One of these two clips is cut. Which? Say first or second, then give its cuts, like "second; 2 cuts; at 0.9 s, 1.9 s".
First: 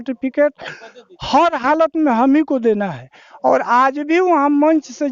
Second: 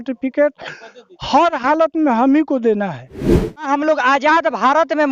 second; 1 cut; at 3.6 s